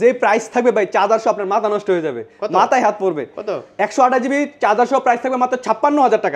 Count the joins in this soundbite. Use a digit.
0